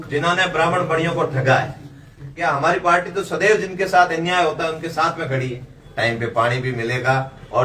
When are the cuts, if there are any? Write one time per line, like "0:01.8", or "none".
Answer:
0:02.4
0:05.8